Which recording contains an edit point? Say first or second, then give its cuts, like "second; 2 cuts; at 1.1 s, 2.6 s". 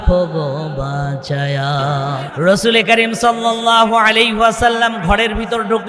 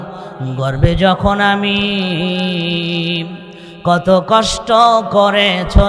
first; 1 cut; at 2.3 s